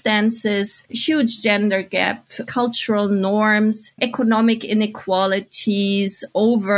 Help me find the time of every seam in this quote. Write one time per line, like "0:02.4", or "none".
0:02.4